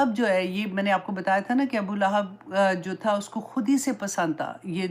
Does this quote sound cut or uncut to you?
uncut